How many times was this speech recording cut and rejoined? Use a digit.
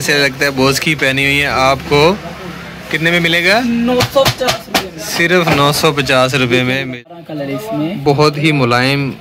1